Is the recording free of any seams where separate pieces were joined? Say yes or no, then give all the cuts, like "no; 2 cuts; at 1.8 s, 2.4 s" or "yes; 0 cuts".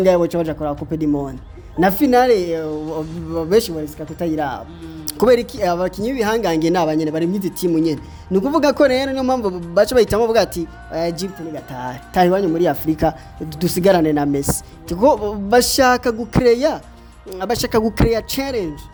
yes; 0 cuts